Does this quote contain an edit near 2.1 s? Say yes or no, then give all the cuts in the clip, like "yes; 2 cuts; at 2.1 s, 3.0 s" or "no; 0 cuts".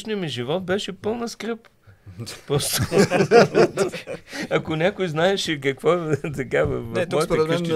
no; 0 cuts